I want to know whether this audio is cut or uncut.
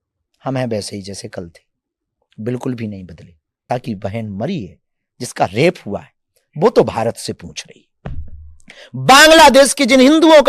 cut